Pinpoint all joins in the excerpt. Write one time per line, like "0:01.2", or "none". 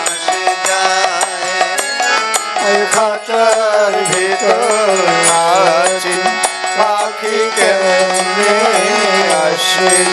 none